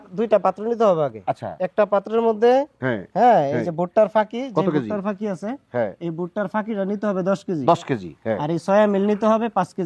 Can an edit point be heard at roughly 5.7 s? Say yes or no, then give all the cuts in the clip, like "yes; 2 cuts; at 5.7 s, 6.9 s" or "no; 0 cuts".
no; 0 cuts